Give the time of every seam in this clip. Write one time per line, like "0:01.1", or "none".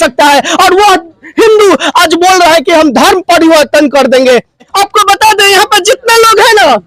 0:04.7

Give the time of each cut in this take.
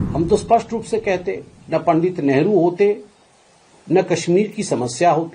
none

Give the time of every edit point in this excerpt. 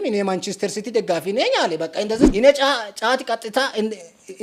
0:02.3

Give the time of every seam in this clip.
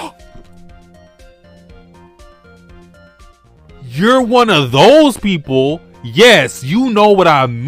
none

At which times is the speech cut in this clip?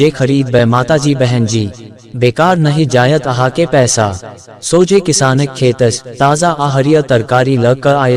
none

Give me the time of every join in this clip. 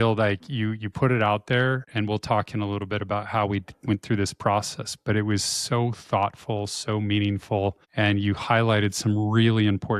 0:01.9
0:07.8

